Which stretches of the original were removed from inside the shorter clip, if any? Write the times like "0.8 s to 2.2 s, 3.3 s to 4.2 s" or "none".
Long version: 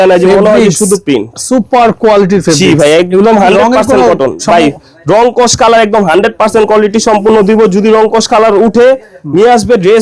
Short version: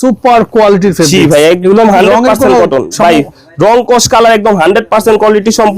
none

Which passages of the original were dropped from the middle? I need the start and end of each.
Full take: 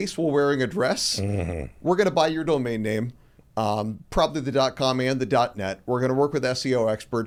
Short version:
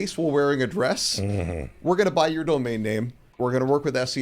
3.2 s to 5.7 s

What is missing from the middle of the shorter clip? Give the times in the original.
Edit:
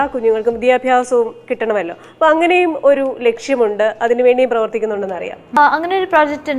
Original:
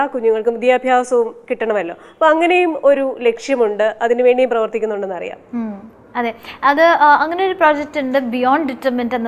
5.6 s to 7.1 s

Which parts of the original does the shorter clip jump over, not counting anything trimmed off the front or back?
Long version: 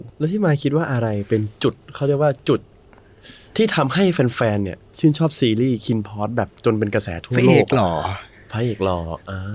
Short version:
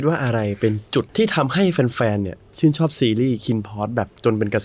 1.8 s to 3.5 s

